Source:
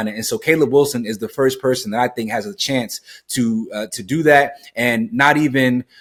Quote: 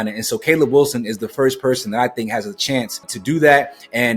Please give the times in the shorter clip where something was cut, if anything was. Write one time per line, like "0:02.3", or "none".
0:03.1